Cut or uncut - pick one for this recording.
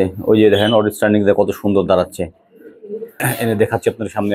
cut